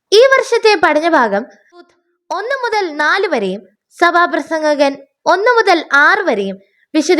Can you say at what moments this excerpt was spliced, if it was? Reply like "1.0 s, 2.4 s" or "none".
1.9 s